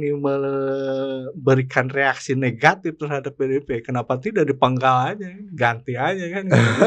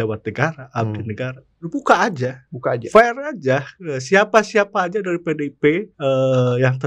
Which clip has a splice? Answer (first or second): second